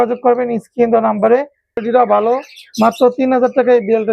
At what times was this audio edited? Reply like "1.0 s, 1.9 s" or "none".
1.8 s